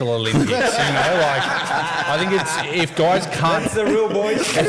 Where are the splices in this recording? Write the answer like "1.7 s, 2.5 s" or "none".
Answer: none